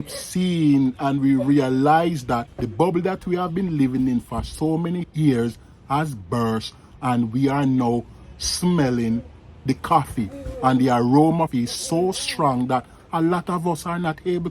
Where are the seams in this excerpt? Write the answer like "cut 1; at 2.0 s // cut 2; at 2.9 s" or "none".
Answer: cut 1; at 2.6 s // cut 2; at 11.5 s